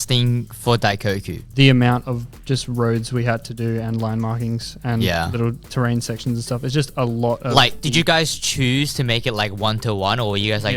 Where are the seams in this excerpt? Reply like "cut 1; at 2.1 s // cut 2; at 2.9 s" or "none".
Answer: none

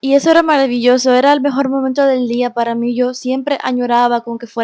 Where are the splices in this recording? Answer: none

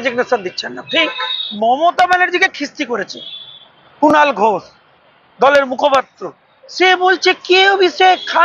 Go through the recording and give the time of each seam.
cut 1; at 1.4 s

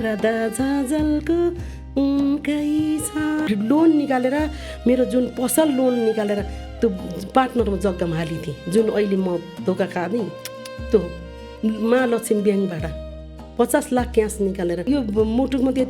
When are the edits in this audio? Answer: cut 1; at 3.5 s // cut 2; at 14.9 s

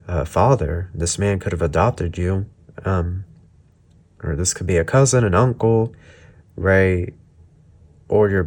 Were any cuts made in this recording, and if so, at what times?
none

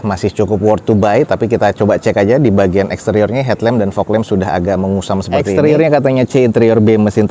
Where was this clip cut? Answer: cut 1; at 5.4 s

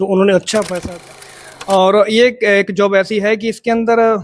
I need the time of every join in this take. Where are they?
cut 1; at 1.0 s

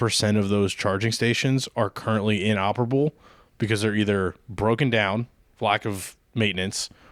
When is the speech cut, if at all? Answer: none

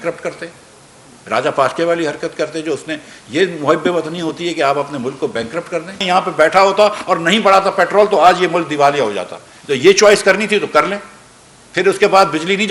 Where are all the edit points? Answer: cut 1; at 6.0 s

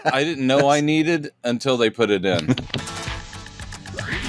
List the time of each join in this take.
cut 1; at 2.6 s

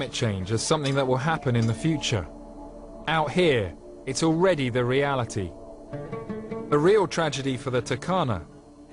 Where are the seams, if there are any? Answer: cut 1; at 6.5 s

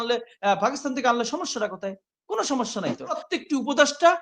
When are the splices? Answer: cut 1; at 3.2 s

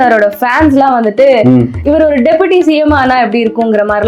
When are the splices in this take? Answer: none

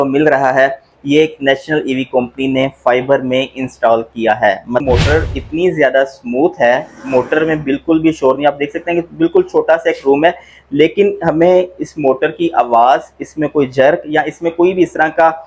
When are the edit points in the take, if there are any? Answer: cut 1; at 4.8 s

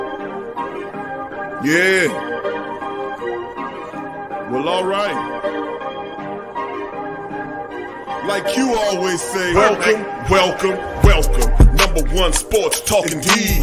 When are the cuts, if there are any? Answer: none

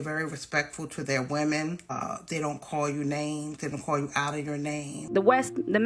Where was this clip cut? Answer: cut 1; at 2.0 s // cut 2; at 5.1 s

